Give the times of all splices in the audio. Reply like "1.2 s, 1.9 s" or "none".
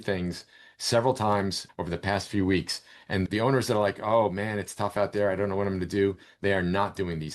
1.6 s